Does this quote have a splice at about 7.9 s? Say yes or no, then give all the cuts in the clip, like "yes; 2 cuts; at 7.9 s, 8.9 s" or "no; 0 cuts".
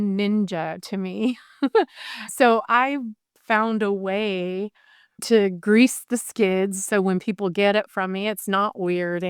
no; 2 cuts; at 3.3 s, 5.1 s